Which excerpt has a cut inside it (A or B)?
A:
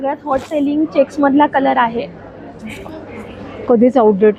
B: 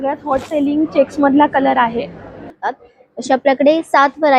B